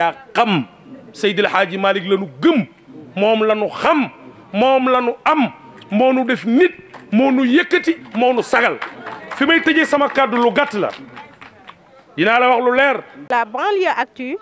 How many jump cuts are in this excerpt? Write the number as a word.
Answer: one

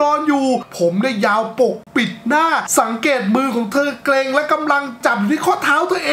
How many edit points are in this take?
zero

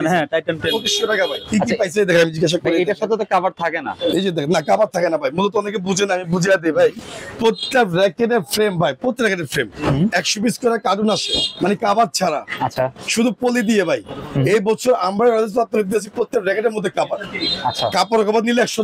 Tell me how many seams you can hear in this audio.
zero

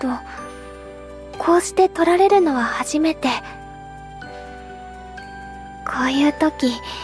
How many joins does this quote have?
zero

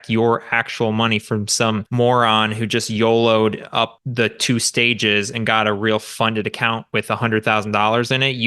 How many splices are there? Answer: two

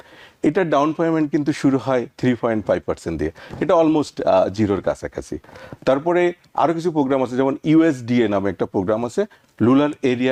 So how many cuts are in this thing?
zero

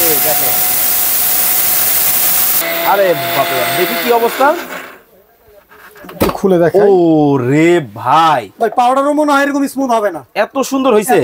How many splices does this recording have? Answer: one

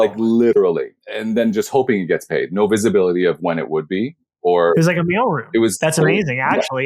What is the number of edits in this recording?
one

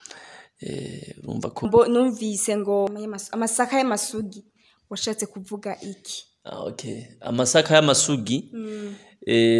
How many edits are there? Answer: two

